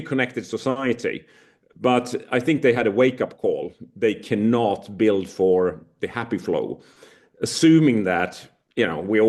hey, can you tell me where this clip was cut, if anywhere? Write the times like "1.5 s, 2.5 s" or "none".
none